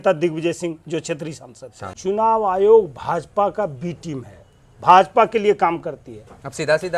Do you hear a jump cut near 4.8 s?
no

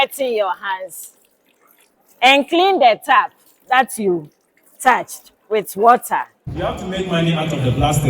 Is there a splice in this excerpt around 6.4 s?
yes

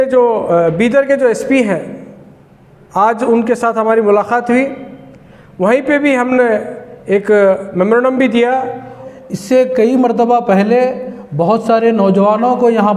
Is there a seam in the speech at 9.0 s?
yes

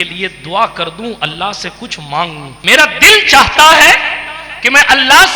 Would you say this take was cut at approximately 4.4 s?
no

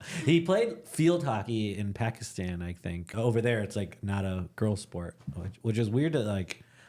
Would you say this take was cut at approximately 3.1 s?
yes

